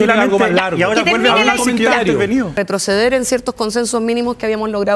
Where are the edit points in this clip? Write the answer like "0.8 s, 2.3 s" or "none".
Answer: 2.6 s